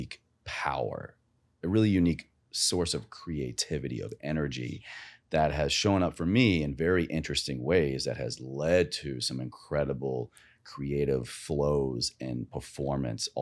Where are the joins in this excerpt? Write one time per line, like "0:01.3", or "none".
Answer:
none